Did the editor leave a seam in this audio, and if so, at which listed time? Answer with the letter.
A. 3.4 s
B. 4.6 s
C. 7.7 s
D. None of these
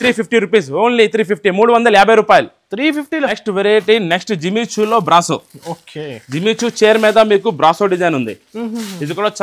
A